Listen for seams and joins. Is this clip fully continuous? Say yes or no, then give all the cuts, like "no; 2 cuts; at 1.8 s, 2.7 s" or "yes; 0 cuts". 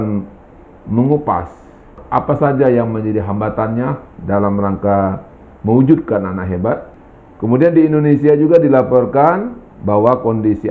no; 1 cut; at 6.9 s